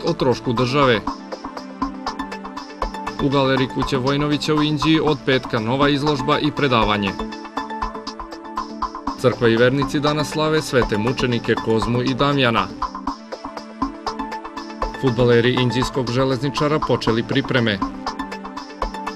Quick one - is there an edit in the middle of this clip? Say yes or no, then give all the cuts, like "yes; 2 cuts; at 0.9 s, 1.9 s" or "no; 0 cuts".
no; 0 cuts